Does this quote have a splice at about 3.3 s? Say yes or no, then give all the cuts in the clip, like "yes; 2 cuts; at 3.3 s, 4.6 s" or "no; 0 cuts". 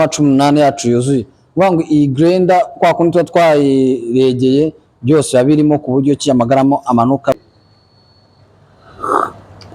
no; 1 cut; at 7.3 s